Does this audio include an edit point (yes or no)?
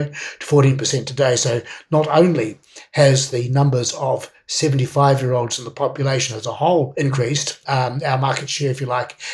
yes